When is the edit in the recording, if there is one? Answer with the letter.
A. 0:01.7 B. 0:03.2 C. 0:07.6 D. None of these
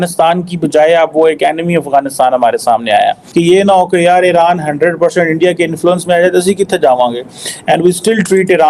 B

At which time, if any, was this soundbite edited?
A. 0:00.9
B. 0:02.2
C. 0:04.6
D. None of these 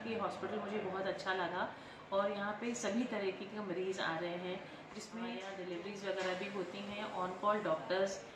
D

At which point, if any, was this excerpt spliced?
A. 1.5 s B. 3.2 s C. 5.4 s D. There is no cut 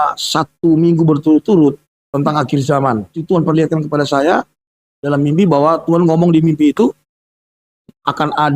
B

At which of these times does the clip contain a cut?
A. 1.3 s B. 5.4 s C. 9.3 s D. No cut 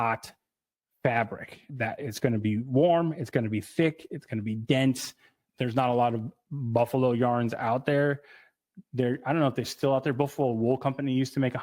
B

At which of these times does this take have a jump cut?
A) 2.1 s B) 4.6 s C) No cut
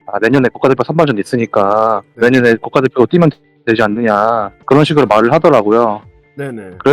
B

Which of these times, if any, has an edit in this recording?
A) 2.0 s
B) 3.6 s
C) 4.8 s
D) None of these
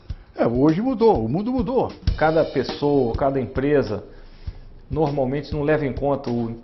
A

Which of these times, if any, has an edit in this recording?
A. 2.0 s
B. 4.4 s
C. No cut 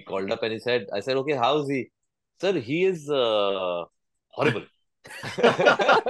C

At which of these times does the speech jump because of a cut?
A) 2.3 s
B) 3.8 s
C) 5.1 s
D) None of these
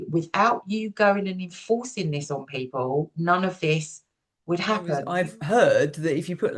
C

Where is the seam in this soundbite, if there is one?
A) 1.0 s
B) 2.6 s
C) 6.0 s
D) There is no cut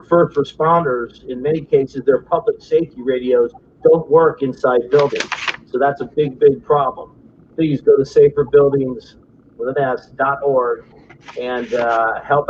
D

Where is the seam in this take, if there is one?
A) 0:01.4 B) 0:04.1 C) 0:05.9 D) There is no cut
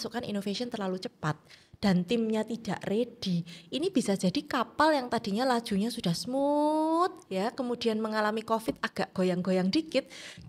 D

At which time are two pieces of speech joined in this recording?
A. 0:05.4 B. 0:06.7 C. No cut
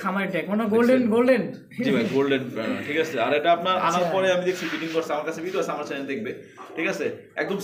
C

